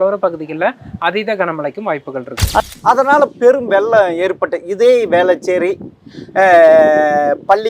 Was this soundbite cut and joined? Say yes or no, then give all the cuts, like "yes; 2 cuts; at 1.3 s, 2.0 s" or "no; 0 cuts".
yes; 1 cut; at 2.6 s